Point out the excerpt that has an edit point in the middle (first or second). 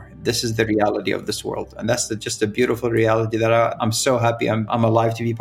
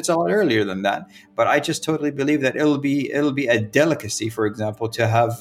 first